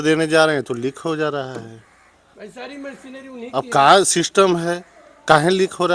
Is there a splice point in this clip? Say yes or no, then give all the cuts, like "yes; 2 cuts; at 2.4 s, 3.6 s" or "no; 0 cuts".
no; 0 cuts